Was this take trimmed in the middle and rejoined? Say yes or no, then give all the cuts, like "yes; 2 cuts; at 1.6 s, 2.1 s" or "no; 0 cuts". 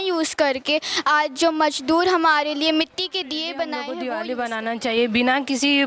yes; 1 cut; at 4.1 s